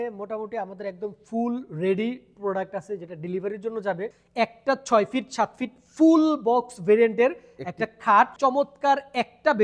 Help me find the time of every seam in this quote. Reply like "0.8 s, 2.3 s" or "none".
4.2 s, 8.3 s